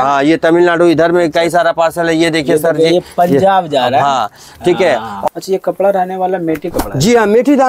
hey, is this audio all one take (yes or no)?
no